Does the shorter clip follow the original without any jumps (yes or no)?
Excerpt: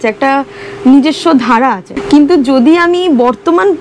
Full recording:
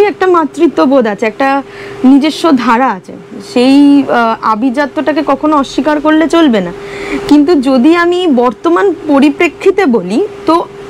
no